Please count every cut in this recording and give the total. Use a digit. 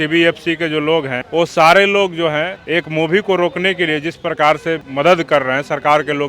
3